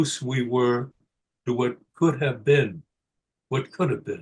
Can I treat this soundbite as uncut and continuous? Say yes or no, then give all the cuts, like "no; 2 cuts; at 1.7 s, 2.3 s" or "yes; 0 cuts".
yes; 0 cuts